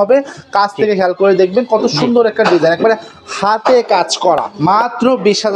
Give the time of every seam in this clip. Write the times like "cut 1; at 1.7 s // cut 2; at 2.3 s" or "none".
cut 1; at 4.5 s